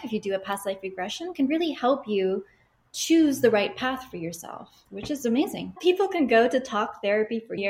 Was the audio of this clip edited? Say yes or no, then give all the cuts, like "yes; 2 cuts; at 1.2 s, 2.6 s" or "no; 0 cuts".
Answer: yes; 1 cut; at 5.8 s